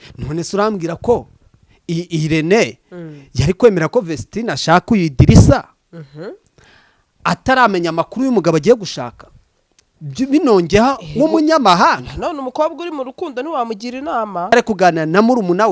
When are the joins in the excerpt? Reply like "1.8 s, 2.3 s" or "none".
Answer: 14.5 s